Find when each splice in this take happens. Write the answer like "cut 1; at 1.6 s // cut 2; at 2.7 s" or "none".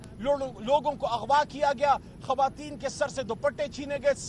none